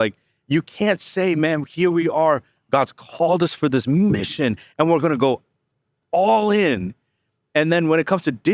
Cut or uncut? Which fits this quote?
uncut